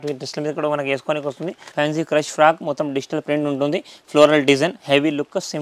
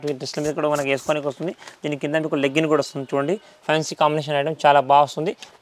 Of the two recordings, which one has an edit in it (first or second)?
first